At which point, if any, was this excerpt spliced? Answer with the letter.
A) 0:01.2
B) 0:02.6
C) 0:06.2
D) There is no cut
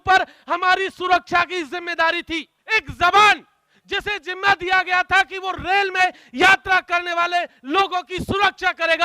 B